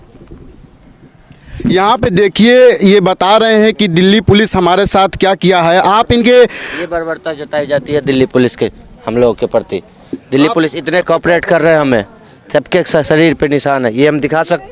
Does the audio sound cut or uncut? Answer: uncut